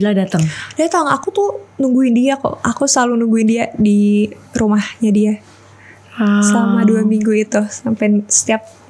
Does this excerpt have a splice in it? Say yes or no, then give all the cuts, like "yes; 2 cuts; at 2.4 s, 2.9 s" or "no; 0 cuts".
no; 0 cuts